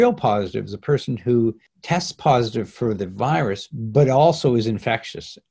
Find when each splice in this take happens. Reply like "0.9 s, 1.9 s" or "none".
1.7 s